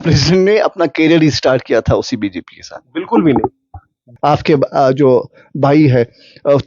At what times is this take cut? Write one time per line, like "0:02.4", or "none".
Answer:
0:04.0